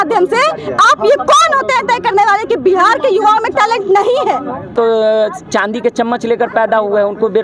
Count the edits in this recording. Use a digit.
1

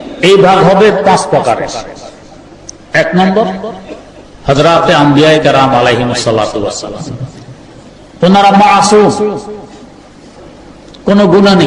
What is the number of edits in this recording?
1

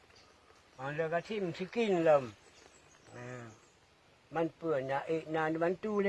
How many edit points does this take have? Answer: 0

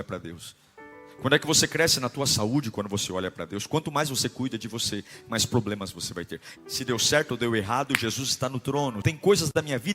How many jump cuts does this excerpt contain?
2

